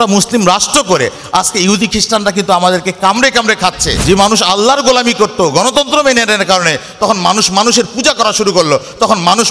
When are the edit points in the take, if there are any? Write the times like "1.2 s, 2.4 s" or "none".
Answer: 3.9 s